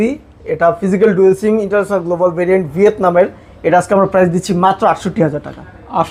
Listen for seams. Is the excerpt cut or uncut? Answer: uncut